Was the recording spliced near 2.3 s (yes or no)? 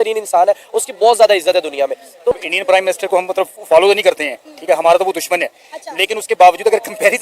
yes